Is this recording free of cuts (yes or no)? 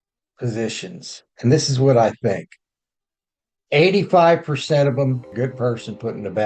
no